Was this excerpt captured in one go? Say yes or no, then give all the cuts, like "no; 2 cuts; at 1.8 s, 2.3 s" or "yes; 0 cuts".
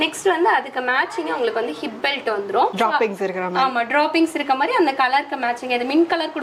yes; 0 cuts